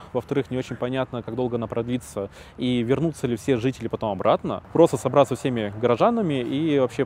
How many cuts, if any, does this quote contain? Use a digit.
1